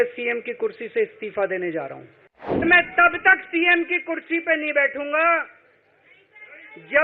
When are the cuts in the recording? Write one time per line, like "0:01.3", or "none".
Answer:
0:02.6